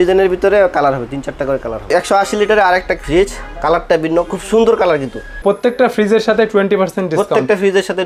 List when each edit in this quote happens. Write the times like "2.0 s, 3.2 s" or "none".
1.9 s, 3.0 s, 5.3 s